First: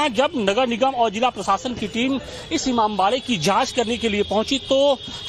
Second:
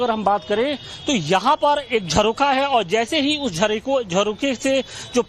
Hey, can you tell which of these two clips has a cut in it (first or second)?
second